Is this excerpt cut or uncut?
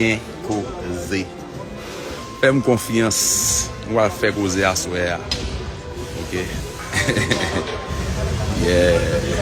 uncut